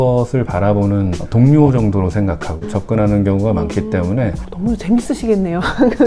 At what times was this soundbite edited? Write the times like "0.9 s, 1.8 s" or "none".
1.2 s, 2.6 s, 4.4 s